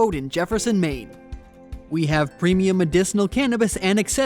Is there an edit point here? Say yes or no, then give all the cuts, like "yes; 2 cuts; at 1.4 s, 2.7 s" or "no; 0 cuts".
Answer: yes; 1 cut; at 1.0 s